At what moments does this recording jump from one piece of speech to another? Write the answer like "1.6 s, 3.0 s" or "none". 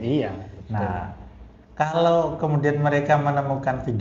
none